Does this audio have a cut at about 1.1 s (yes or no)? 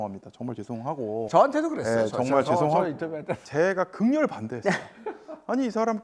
no